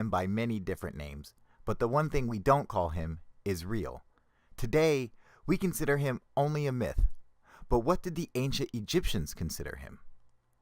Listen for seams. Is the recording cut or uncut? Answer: cut